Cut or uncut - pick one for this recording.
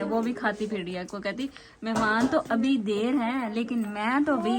uncut